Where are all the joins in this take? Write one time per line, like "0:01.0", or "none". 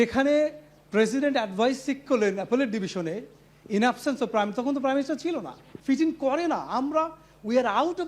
0:05.7

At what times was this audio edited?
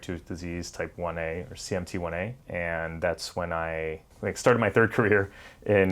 0:02.4
0:04.2

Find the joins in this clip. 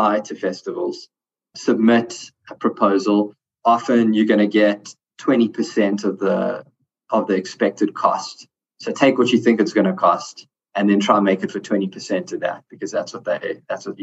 none

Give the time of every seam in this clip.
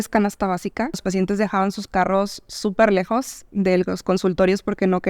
0:01.0

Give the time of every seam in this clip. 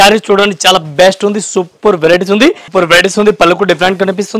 0:02.6

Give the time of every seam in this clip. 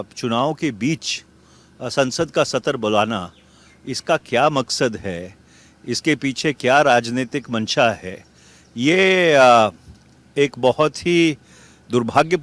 0:09.4

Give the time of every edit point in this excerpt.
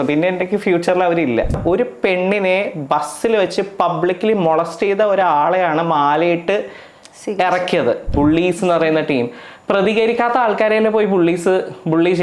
0:01.6
0:08.1

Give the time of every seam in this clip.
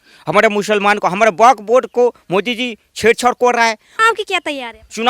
0:03.9

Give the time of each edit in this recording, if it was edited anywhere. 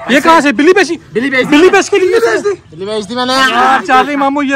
none

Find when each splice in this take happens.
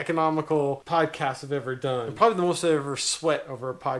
0:02.1

